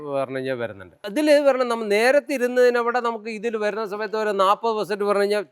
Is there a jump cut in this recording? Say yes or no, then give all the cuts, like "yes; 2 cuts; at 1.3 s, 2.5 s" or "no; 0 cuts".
yes; 1 cut; at 0.9 s